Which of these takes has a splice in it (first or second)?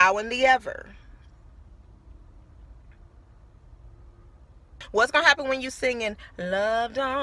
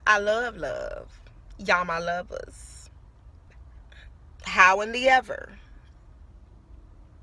first